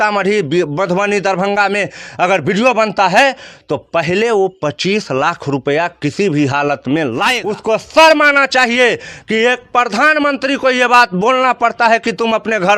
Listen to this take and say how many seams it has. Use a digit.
1